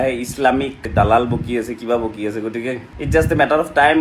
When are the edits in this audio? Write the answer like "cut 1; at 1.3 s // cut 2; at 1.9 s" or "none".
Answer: cut 1; at 0.9 s // cut 2; at 2.9 s